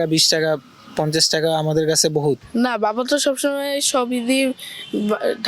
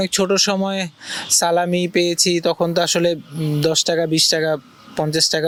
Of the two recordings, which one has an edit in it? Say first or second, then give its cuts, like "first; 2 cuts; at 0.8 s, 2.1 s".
first; 1 cut; at 2.5 s